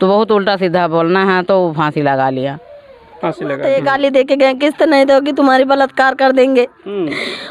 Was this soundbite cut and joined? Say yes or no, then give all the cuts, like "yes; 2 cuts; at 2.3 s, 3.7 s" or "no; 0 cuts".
yes; 1 cut; at 3.6 s